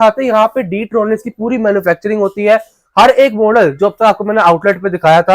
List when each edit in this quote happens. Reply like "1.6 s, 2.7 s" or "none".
none